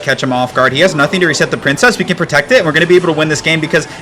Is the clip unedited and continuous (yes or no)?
yes